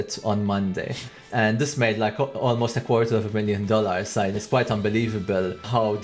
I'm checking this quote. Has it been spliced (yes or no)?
yes